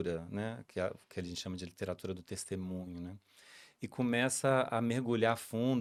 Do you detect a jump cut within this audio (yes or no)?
no